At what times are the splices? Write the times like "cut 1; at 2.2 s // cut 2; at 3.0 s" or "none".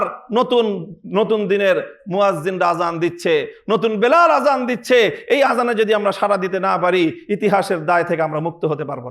none